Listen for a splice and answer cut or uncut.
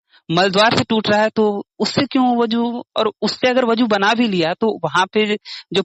uncut